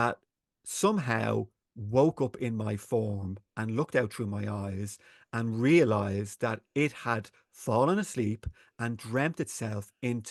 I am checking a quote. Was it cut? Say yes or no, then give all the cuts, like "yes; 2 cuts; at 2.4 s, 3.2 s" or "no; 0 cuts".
no; 0 cuts